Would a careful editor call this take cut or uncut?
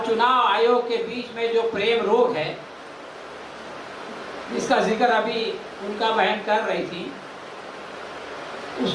uncut